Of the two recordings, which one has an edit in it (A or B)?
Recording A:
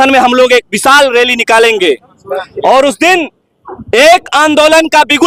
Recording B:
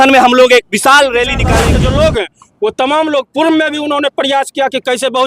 B